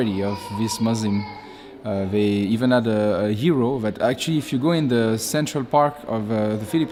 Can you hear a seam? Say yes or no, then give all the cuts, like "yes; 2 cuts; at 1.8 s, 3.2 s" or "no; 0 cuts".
no; 0 cuts